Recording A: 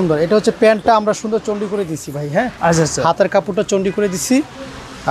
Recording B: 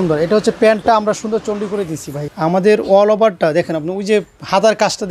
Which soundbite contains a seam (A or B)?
B